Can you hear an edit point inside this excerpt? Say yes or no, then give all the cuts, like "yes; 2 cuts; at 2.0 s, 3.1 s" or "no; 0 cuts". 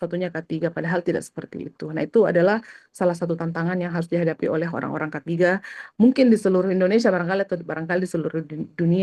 no; 0 cuts